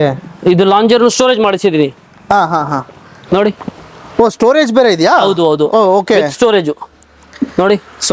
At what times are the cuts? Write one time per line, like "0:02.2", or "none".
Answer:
none